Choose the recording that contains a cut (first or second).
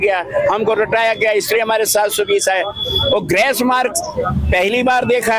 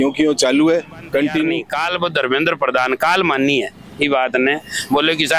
second